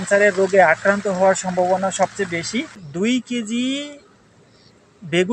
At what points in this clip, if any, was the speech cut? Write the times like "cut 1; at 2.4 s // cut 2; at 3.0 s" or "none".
cut 1; at 2.8 s